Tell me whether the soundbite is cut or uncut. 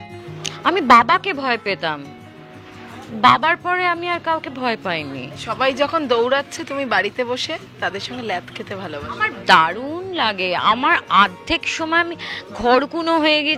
cut